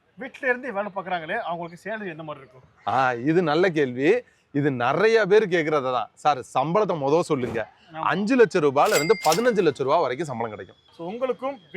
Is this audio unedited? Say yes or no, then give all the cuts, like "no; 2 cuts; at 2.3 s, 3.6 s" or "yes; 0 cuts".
no; 1 cut; at 10.8 s